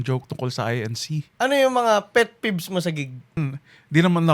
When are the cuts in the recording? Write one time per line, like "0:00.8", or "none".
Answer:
0:01.3
0:03.4